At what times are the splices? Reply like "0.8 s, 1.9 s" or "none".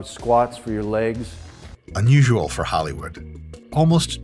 none